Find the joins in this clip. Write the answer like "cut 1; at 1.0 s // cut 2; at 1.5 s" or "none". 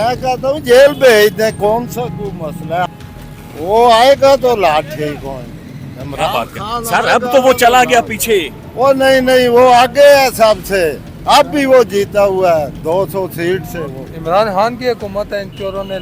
cut 1; at 2.9 s // cut 2; at 14.1 s